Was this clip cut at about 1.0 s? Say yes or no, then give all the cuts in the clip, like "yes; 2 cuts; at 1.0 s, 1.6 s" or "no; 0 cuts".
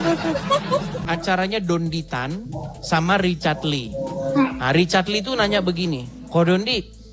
yes; 1 cut; at 1.0 s